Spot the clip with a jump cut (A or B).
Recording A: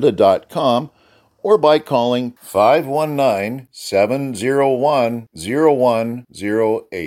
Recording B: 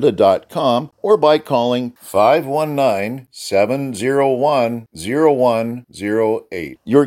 B